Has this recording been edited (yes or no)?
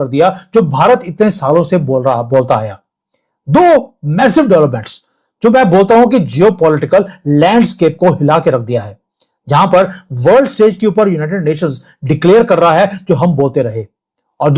no